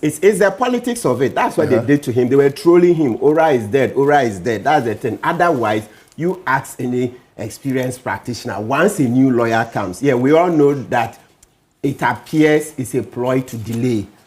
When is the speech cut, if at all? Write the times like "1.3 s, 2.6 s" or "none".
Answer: none